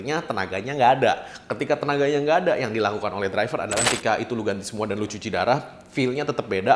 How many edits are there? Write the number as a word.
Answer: one